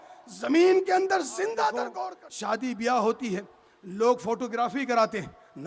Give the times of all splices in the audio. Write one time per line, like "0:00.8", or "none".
0:01.9